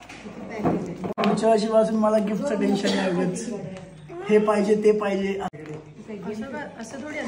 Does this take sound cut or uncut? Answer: cut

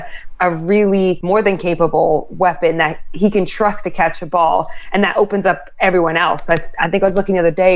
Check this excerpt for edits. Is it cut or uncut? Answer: cut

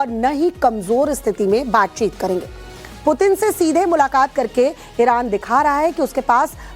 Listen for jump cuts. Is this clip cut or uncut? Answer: cut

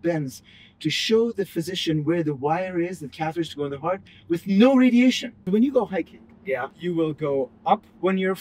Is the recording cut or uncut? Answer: cut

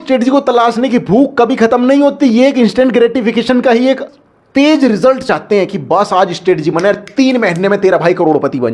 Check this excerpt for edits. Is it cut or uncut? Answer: cut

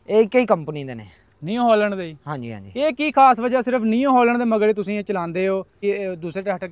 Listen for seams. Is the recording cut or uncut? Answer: cut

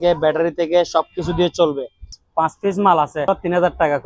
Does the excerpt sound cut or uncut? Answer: cut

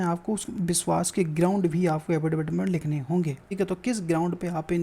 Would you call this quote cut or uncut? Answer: cut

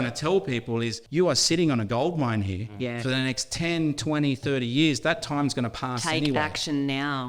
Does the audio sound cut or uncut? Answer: cut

